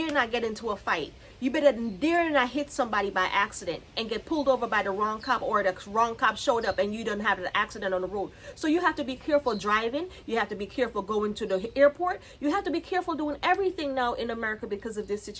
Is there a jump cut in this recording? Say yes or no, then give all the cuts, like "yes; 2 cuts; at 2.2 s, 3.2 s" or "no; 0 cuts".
no; 0 cuts